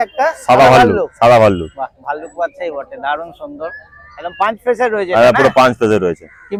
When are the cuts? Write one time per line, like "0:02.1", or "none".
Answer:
none